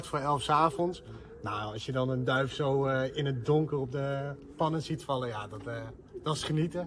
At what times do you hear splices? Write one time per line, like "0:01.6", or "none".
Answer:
none